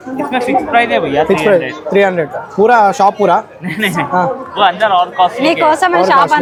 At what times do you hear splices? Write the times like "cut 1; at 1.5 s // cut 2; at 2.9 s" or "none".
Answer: none